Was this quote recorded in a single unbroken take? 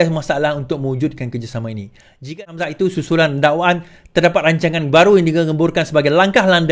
no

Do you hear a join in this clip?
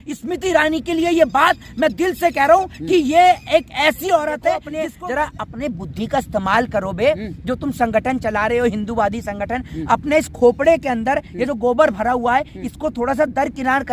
yes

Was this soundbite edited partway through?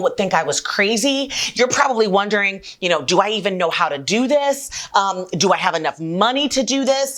no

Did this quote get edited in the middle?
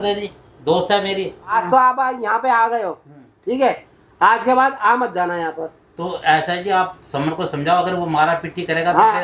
yes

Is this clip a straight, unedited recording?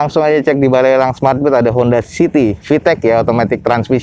yes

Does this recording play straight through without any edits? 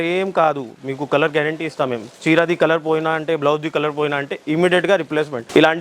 yes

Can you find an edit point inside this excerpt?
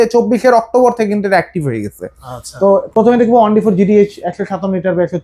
no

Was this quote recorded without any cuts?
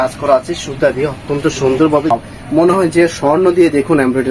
no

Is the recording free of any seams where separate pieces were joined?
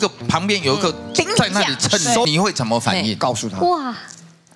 no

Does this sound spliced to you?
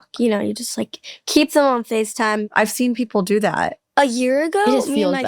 yes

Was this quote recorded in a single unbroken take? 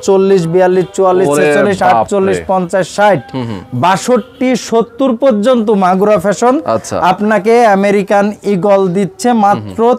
yes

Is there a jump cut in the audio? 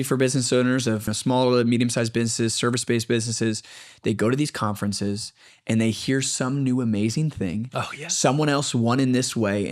yes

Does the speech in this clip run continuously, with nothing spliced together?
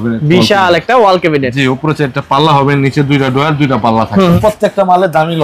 no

